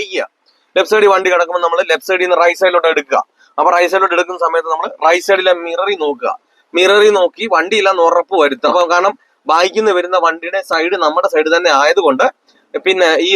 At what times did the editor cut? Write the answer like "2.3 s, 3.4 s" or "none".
8.7 s